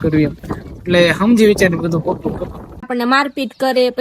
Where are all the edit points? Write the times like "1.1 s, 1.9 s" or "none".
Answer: 2.9 s